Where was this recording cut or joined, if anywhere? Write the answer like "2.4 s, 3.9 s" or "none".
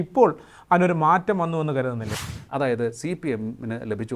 2.1 s